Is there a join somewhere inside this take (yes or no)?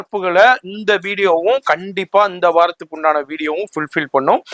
no